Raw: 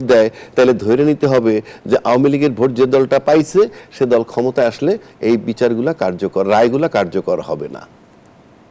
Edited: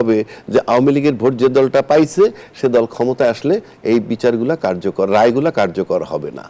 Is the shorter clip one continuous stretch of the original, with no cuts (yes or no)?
yes